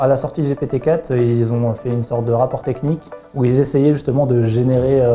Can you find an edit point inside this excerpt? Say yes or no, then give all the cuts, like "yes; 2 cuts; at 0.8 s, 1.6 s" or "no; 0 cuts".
no; 0 cuts